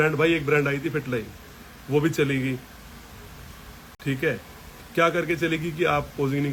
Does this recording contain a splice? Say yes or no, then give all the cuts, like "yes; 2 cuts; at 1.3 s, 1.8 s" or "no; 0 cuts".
no; 0 cuts